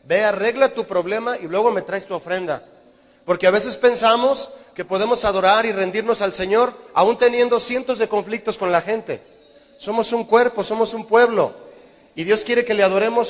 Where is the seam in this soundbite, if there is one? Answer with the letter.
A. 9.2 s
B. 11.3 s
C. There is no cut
A